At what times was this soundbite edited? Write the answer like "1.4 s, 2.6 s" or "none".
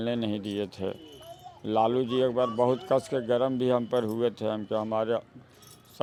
none